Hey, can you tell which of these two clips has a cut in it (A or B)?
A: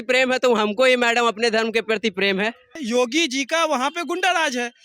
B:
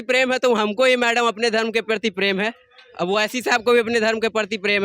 A